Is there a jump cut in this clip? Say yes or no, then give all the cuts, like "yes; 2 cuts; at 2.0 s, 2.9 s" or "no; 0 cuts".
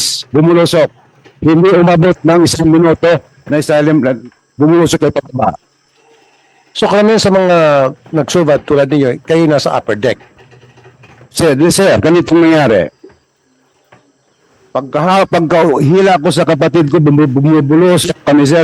no; 0 cuts